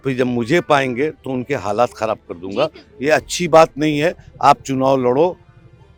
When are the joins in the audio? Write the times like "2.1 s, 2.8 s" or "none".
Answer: none

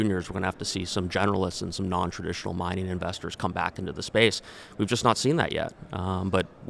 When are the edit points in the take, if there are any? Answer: none

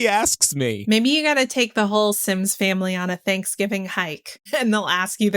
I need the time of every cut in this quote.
0.8 s, 4.3 s

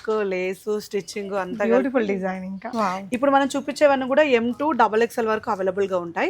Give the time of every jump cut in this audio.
2.7 s

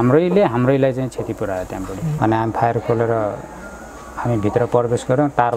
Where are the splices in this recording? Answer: 2.1 s

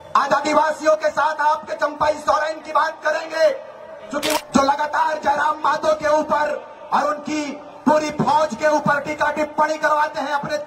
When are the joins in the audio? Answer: 4.3 s

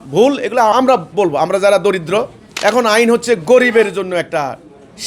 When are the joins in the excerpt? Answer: 0.7 s, 2.4 s

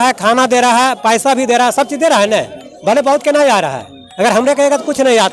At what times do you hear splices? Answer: none

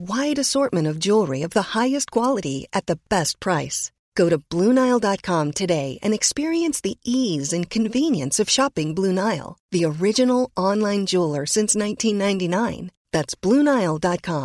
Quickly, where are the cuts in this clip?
none

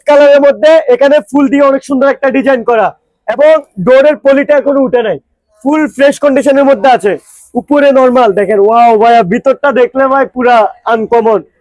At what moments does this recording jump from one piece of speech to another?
none

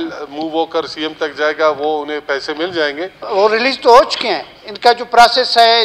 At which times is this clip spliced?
3.2 s

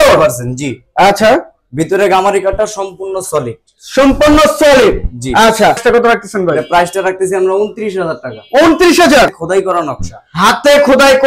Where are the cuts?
5.8 s, 9.4 s

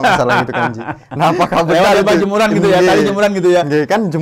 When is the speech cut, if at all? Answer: none

